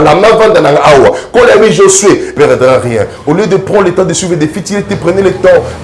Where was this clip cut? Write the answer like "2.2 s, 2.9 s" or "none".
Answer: 2.3 s